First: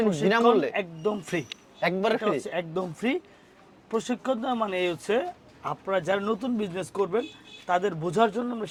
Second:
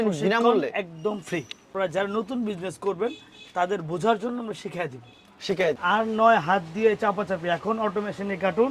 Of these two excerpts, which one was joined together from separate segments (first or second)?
second